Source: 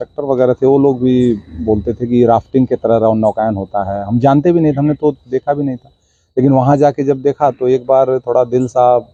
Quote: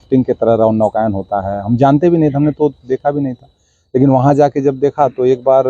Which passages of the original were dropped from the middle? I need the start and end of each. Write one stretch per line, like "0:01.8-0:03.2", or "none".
none